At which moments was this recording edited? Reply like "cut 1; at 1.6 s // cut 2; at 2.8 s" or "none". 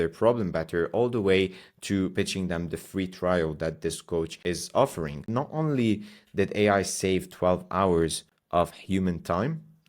cut 1; at 5.2 s